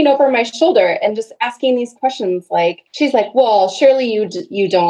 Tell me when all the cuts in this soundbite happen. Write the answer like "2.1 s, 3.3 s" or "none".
2.8 s